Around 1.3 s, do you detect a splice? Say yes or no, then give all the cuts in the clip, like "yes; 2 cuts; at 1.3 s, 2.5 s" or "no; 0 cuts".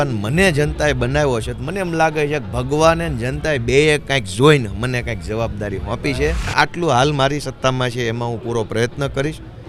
no; 1 cut; at 6.5 s